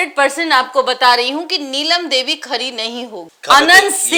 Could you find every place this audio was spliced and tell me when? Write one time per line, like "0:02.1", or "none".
none